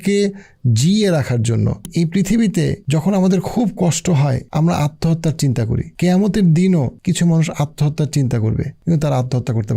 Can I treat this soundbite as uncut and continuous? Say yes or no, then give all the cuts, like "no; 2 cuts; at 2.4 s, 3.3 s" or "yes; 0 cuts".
no; 6 cuts; at 1.9 s, 2.8 s, 4.4 s, 5.9 s, 6.9 s, 8.7 s